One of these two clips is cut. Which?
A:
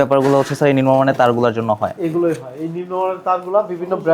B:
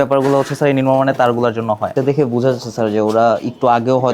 B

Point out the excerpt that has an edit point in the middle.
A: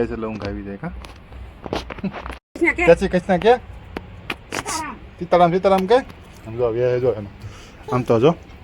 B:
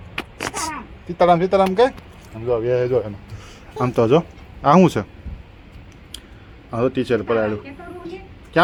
A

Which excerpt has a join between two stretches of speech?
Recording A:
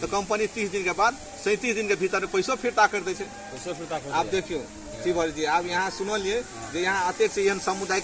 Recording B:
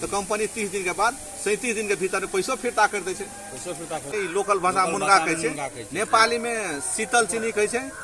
B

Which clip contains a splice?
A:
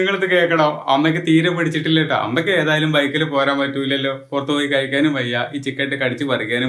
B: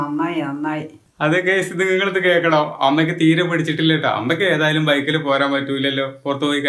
B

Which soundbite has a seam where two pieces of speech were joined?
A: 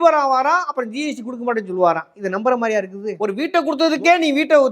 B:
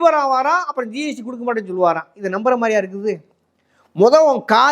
A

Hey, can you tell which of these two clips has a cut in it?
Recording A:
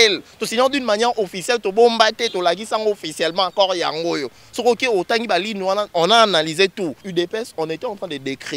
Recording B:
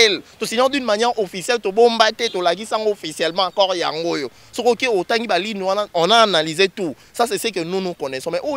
A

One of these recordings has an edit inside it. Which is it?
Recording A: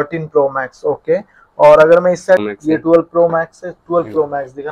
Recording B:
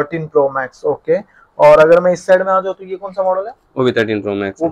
A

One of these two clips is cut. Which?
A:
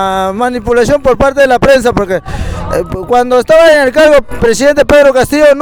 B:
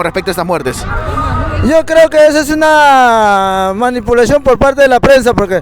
B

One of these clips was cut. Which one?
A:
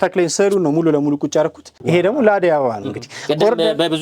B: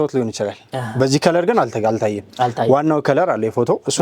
A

